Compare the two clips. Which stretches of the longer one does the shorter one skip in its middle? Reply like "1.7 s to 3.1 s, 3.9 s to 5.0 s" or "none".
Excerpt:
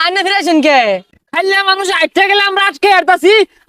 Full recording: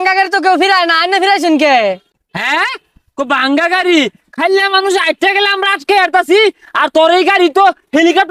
2.1 s to 4.2 s